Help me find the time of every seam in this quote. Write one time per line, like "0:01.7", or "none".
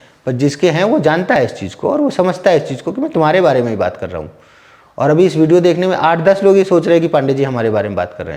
none